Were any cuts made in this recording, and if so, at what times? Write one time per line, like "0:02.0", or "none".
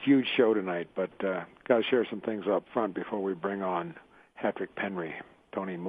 none